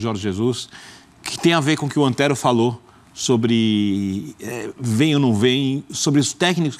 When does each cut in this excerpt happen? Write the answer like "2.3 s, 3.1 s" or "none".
none